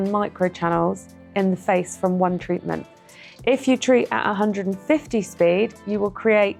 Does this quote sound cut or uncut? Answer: uncut